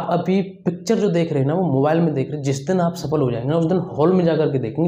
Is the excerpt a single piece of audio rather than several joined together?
yes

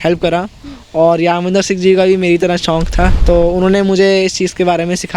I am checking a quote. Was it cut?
yes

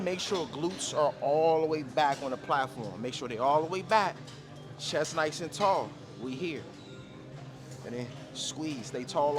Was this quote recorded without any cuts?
yes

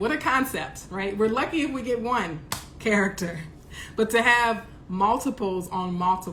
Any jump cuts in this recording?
no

